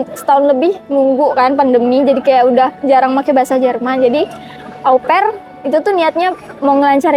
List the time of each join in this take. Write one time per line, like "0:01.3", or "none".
none